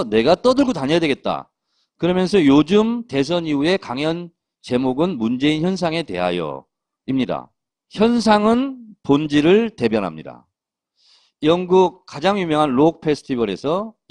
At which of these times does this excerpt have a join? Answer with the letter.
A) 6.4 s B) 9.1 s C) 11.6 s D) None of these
C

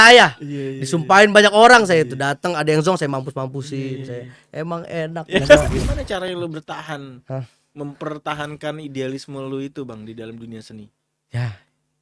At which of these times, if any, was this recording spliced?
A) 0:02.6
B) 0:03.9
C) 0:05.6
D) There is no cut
C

